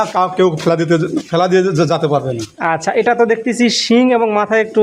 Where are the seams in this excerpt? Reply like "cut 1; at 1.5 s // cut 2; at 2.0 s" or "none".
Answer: none